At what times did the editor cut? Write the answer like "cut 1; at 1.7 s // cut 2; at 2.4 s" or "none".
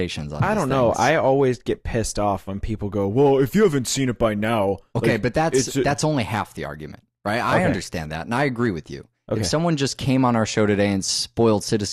cut 1; at 2.3 s